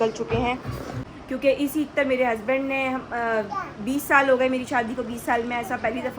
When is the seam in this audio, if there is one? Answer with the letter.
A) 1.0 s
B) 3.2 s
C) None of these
A